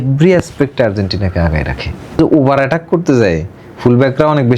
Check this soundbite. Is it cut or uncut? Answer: cut